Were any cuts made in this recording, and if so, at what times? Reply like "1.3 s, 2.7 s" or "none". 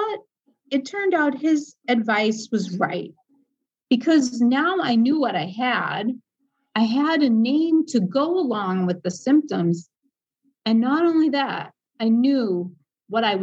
none